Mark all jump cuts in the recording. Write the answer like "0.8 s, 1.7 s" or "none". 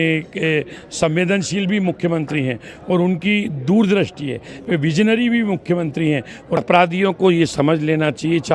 6.6 s